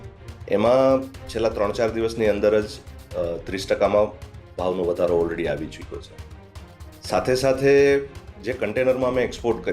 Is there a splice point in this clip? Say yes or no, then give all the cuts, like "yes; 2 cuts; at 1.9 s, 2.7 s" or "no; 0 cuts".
no; 0 cuts